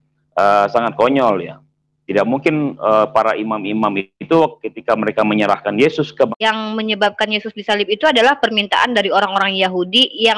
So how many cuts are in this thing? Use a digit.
1